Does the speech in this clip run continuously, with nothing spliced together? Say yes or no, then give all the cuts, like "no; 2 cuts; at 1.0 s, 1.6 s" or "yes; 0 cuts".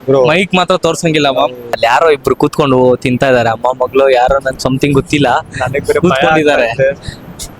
no; 1 cut; at 1.8 s